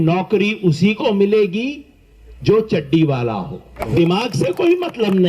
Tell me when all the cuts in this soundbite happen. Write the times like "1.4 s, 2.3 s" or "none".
3.8 s